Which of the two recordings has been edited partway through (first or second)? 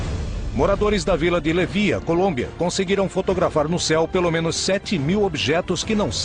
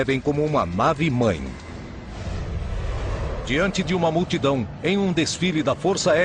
first